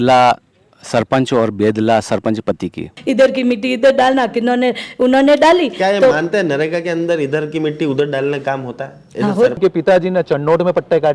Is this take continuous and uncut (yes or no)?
no